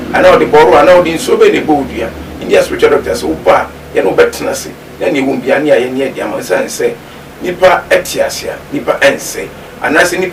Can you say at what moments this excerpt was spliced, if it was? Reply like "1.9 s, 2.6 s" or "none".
none